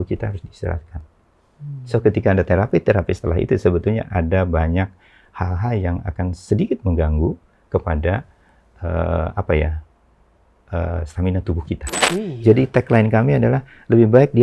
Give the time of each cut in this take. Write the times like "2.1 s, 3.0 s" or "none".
12.0 s

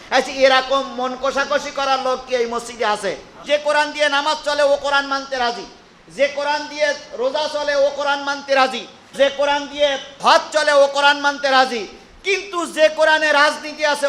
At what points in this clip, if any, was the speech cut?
3.3 s

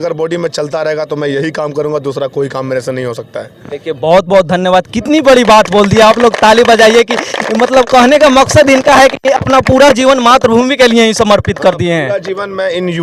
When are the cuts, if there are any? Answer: none

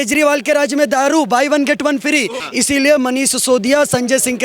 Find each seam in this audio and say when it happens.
2.4 s

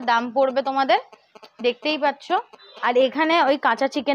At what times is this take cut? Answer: none

